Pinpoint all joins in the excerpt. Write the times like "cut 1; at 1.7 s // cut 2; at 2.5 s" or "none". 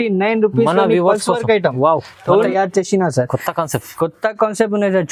cut 1; at 2.5 s